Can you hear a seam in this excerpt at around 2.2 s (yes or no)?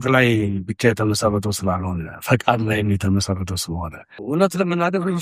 no